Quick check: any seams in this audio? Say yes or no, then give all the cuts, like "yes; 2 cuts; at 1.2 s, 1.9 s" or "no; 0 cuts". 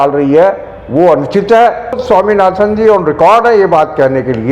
yes; 1 cut; at 2.0 s